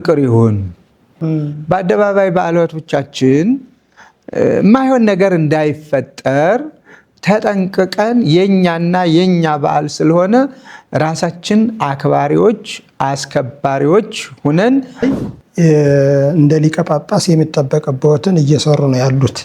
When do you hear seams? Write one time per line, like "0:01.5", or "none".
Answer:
0:01.1
0:15.0

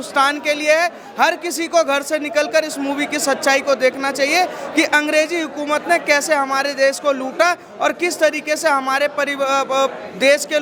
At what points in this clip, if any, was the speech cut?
none

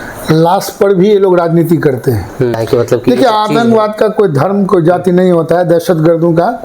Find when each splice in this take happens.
0:02.5

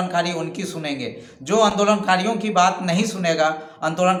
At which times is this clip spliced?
none

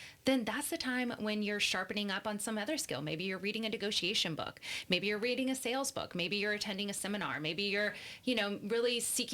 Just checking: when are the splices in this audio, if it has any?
none

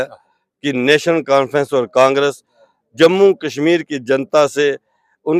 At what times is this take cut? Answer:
none

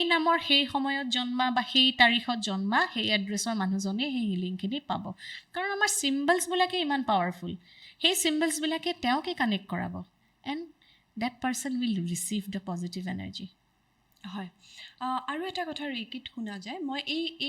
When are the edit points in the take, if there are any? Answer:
none

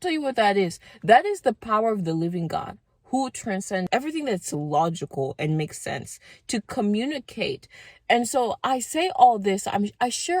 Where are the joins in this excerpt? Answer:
0:03.9

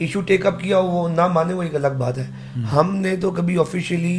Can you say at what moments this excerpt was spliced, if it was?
none

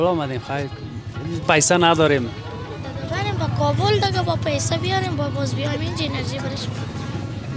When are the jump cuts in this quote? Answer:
none

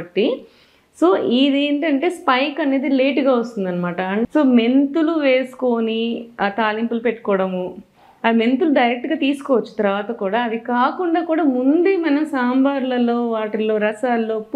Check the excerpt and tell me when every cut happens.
0:04.1

